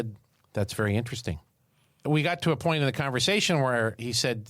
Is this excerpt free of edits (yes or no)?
no